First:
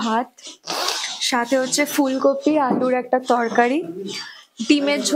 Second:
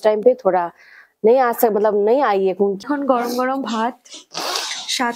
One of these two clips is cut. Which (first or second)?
second